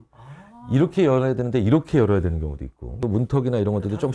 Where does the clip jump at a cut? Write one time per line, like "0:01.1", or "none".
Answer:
0:02.8